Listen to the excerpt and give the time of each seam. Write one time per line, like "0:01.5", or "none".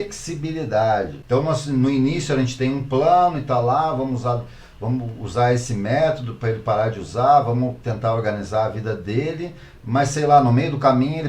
0:01.2